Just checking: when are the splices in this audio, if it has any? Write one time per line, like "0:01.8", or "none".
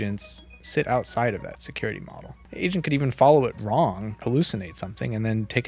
0:02.4
0:04.2